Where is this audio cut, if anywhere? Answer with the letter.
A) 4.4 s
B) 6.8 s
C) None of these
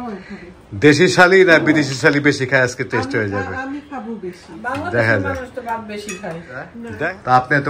B